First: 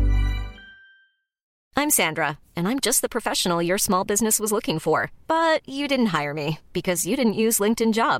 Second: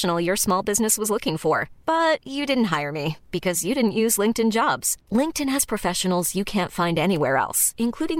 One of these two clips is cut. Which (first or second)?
first